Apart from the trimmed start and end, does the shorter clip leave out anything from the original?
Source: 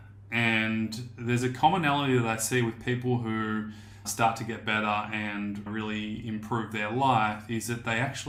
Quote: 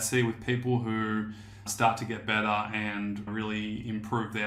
no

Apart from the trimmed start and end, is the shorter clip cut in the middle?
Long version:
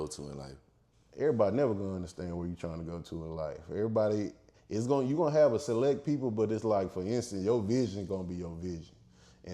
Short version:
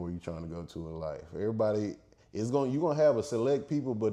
no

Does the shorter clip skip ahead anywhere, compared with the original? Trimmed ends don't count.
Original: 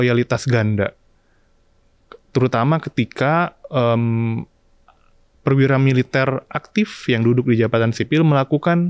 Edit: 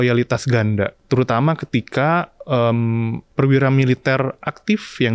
yes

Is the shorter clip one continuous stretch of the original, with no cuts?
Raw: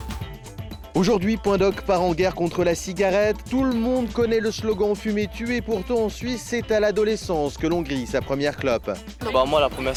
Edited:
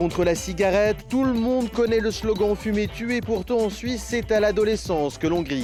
yes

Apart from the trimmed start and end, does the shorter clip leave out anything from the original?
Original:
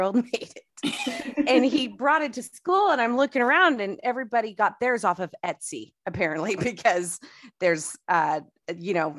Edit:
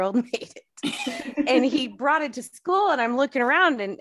no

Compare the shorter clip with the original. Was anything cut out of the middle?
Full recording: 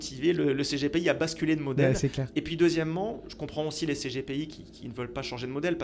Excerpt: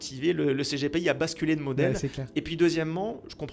no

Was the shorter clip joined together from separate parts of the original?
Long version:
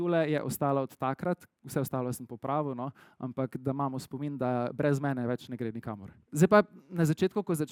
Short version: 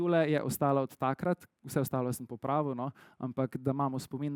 no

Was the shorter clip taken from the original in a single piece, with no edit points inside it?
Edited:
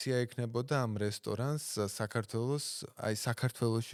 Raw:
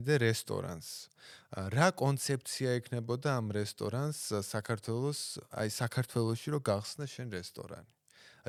yes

